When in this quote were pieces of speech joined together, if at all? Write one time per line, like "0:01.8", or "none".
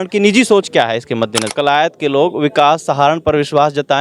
0:01.4